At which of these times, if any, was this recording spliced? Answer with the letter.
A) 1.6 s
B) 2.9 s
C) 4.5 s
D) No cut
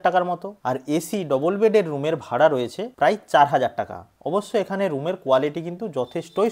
D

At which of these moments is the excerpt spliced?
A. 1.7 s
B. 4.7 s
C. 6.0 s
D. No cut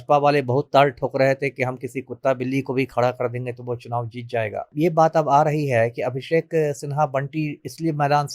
B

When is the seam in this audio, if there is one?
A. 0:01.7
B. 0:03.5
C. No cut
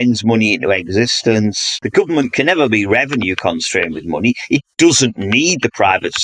A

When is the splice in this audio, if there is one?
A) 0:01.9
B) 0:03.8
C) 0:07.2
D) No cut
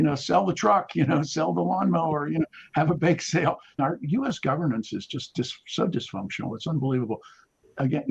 B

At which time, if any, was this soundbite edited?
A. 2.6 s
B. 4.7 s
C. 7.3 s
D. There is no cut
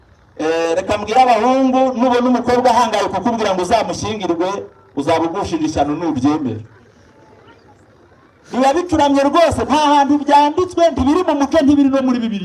D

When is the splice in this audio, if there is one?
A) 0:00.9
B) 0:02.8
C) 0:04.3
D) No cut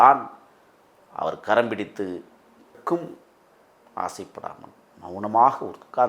B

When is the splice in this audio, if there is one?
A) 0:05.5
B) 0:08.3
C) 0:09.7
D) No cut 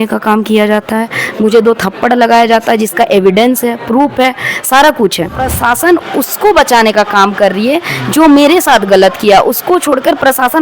A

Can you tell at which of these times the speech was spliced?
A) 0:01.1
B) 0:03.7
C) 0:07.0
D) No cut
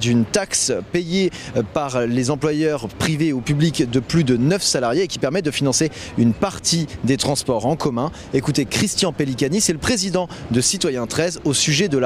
A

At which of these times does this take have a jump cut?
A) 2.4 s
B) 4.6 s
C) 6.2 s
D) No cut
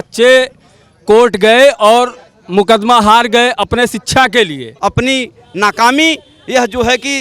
B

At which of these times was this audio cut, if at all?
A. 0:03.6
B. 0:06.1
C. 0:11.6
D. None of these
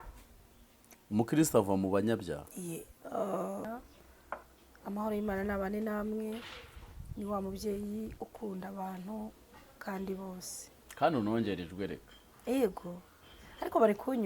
A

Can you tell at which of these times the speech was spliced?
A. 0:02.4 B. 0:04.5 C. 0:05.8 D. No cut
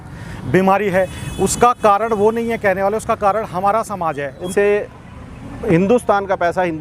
B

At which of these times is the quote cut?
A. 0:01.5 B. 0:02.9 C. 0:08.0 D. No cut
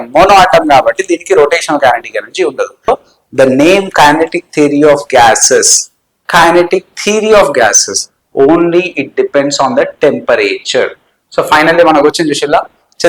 B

